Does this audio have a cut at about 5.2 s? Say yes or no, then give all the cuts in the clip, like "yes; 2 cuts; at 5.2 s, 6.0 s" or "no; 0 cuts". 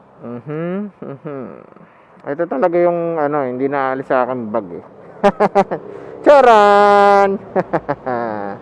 no; 1 cut; at 6.6 s